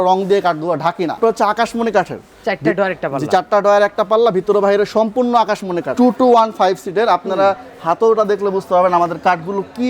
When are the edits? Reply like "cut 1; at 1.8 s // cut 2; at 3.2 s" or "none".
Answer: cut 1; at 1.2 s // cut 2; at 5.9 s